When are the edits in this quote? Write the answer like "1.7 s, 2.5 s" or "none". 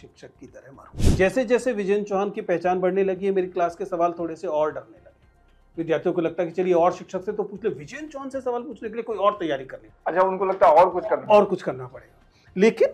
1.0 s